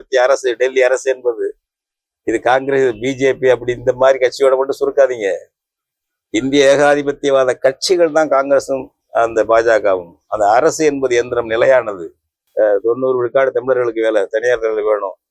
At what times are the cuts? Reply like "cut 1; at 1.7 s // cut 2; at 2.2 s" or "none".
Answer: cut 1; at 12.4 s